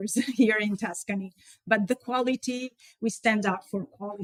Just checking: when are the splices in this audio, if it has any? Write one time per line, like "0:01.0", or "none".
none